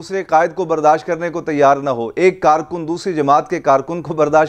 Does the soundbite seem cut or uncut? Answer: uncut